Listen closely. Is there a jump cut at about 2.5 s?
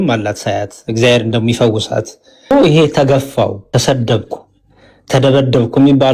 yes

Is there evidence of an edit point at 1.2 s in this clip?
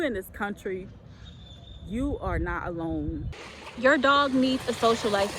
no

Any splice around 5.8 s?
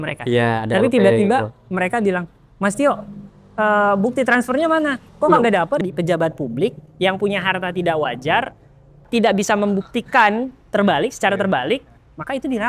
yes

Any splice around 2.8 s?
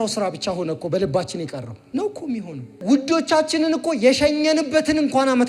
yes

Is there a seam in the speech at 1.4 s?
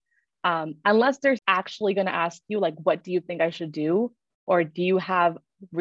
yes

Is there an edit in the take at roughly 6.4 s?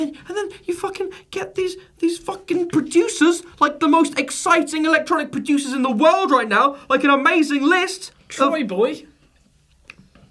no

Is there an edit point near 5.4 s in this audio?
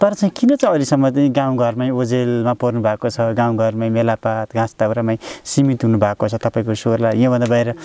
no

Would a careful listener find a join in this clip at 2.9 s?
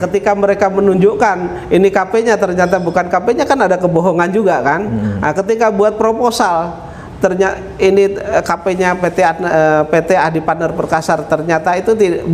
no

